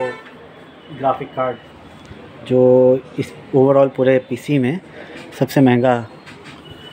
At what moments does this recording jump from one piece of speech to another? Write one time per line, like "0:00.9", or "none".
none